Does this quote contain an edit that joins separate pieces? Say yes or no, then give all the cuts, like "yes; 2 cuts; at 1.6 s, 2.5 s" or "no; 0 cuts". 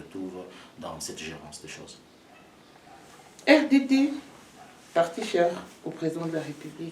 no; 0 cuts